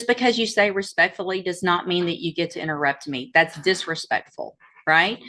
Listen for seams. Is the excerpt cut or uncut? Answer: uncut